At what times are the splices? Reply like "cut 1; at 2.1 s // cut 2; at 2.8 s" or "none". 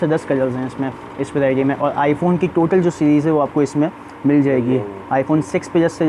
none